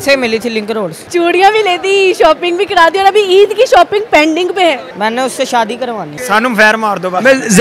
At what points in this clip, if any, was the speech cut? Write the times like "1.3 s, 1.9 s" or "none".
1.0 s, 4.9 s, 6.2 s